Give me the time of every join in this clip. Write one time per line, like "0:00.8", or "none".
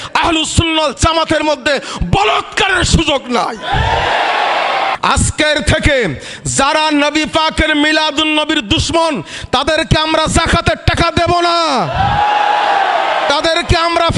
0:04.9